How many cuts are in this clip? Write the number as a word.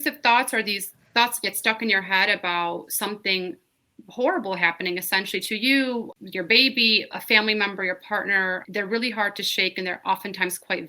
three